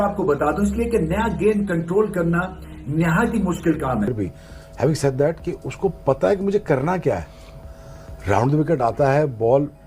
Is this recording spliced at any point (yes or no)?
yes